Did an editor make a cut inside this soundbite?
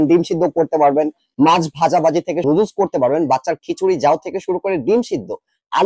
yes; 1 cut; at 2.4 s

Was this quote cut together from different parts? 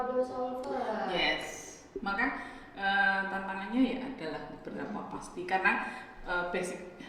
no; 0 cuts

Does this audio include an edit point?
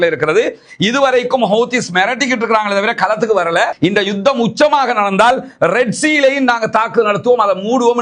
no; 0 cuts

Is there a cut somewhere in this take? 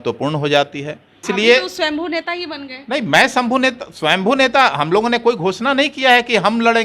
yes; 1 cut; at 1.2 s

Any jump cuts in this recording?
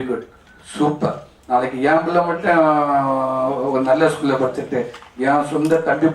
yes; 1 cut; at 1.3 s

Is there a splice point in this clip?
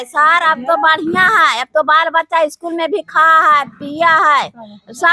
no; 0 cuts

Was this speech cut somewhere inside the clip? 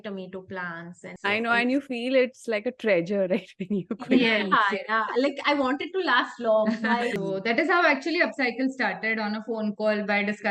yes; 2 cuts; at 1.1 s, 7.2 s

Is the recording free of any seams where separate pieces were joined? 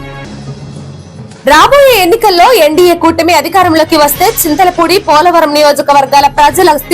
no; 1 cut; at 1.0 s

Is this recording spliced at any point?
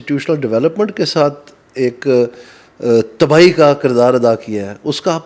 no; 0 cuts

